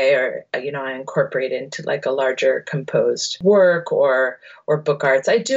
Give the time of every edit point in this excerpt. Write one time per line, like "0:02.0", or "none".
0:03.3